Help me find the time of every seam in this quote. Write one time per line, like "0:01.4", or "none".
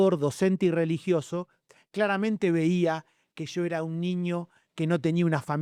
none